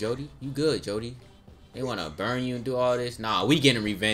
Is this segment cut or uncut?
uncut